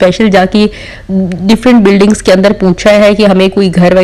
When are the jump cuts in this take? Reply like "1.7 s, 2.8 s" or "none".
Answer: none